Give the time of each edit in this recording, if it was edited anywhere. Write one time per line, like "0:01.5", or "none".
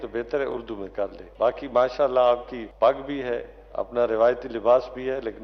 0:01.2
0:02.6